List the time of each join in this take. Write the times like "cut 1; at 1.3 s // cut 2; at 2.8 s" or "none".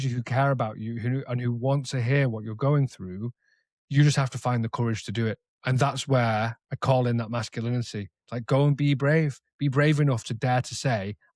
none

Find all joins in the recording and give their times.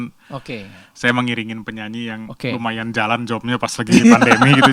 none

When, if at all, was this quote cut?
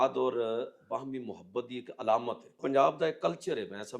cut 1; at 2.5 s

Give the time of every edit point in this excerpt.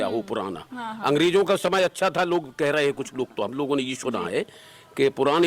none

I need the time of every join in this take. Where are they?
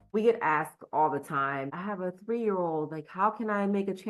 cut 1; at 1.7 s

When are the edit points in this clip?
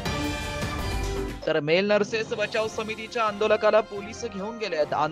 cut 1; at 1.1 s

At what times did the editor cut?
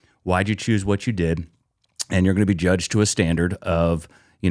none

